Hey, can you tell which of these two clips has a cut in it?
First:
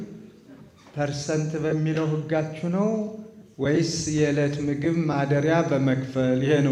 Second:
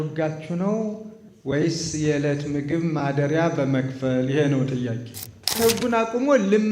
second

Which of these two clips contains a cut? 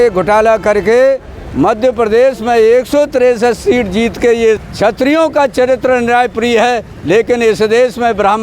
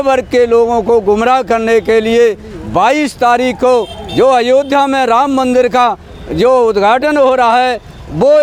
first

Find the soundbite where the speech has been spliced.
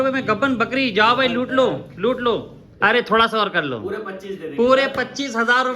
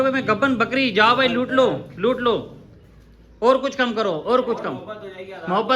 first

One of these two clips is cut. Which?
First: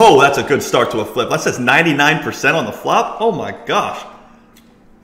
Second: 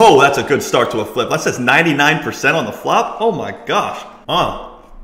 second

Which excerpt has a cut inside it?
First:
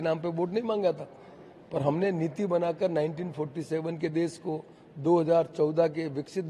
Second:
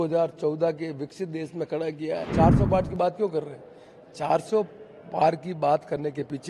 second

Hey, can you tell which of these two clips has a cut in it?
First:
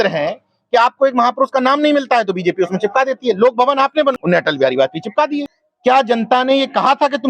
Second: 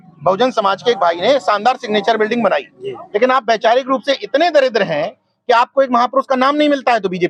first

